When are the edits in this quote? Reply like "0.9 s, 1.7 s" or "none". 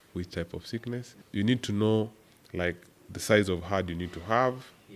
1.1 s